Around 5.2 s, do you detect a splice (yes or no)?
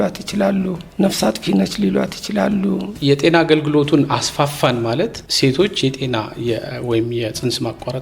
no